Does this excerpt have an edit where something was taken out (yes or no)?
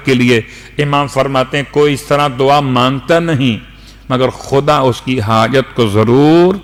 no